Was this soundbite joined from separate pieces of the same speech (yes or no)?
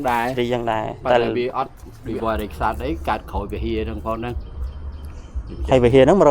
yes